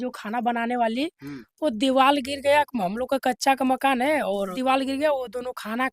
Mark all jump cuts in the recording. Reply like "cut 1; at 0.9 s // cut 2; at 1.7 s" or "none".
cut 1; at 4.6 s

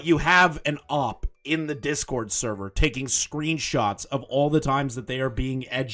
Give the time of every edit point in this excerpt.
none

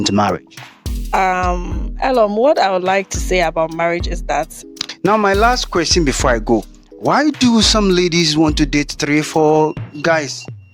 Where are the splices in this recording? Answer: cut 1; at 4.6 s

